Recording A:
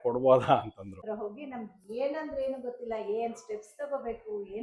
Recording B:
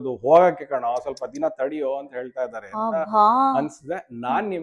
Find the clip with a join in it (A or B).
A